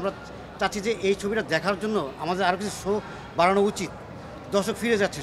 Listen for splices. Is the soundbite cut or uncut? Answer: uncut